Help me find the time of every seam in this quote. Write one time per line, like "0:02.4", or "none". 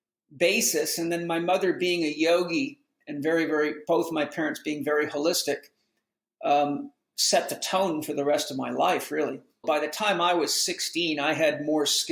0:09.6